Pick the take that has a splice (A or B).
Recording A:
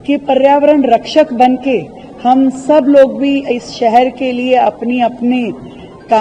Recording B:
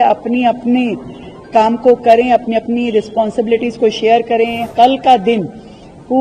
B